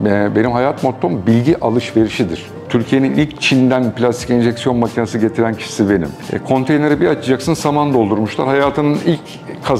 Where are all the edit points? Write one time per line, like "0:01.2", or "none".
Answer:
0:02.6
0:06.2